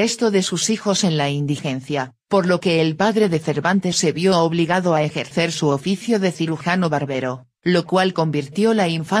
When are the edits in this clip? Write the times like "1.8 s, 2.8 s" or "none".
1.2 s